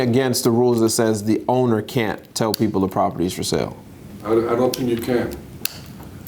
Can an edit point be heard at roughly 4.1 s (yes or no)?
yes